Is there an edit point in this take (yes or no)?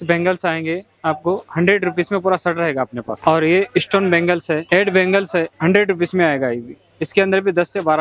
no